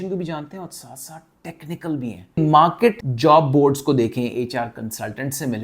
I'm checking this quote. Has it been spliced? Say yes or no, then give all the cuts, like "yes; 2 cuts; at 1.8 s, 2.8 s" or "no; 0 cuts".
yes; 1 cut; at 2.4 s